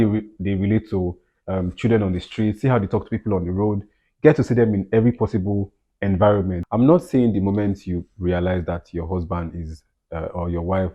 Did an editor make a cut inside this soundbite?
yes; 1 cut; at 6.6 s

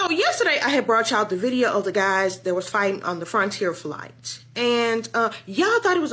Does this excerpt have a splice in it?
no; 0 cuts

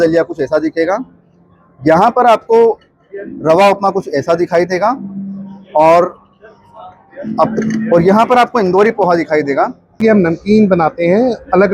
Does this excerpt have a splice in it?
yes; 1 cut; at 9.9 s

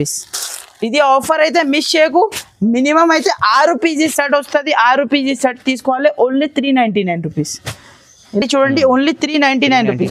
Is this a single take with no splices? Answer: yes; 0 cuts

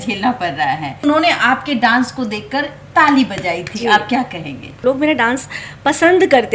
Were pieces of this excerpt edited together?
yes; 2 cuts; at 1.0 s, 4.8 s

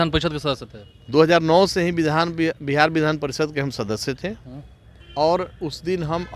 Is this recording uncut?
yes; 0 cuts

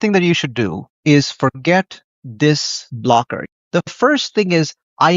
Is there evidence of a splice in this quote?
yes; 1 cut; at 3.4 s

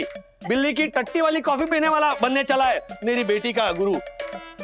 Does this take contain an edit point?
no; 0 cuts

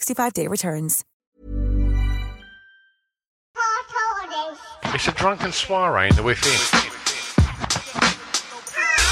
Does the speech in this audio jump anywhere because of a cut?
yes; 1 cut; at 3.4 s

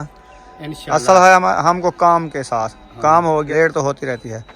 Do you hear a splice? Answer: yes; 1 cut; at 3.5 s

